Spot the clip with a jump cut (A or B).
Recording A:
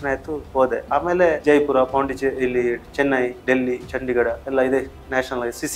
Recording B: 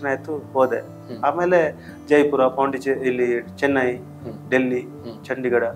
A